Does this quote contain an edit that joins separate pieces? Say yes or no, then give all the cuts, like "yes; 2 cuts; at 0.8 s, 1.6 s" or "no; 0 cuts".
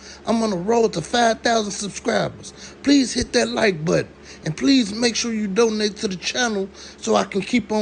no; 0 cuts